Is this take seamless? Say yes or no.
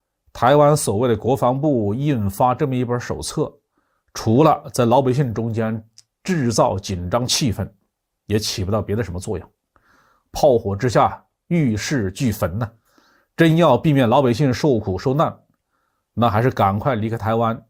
yes